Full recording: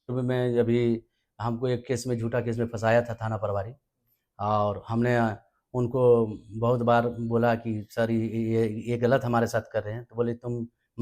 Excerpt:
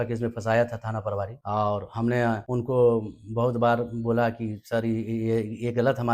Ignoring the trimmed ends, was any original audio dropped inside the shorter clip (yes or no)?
yes